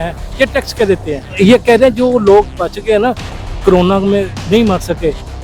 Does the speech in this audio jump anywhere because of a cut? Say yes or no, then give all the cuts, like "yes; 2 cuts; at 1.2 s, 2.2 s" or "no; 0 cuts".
yes; 1 cut; at 1.2 s